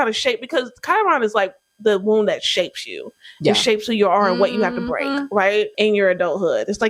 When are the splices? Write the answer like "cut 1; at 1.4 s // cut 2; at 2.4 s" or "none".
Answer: cut 1; at 5.7 s